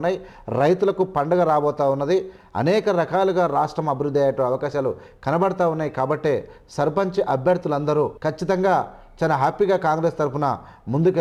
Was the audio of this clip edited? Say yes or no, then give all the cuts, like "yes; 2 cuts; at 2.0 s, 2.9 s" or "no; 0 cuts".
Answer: no; 0 cuts